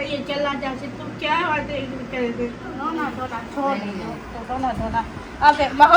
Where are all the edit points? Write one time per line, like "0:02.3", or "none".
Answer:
0:02.8